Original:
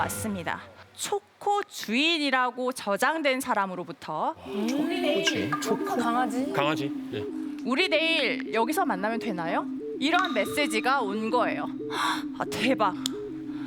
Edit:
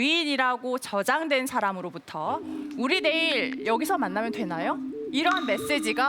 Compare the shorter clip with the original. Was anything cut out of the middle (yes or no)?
yes